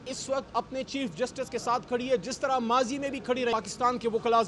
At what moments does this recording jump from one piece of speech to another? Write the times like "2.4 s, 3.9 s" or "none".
3.5 s